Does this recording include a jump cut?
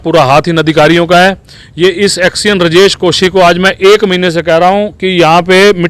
no; 0 cuts

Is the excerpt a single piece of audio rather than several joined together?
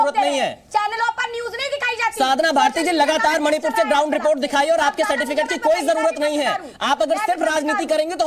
yes; 0 cuts

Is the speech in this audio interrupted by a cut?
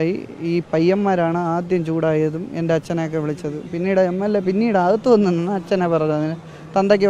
no; 0 cuts

